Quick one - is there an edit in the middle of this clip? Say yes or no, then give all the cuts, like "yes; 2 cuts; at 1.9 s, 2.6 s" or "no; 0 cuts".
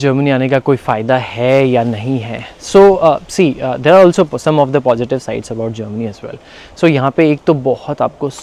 no; 0 cuts